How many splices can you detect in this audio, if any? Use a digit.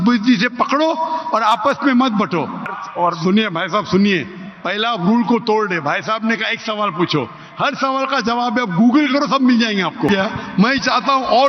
2